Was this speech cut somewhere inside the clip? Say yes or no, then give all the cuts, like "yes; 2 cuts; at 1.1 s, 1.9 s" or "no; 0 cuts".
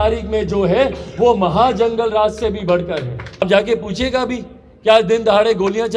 yes; 1 cut; at 3.4 s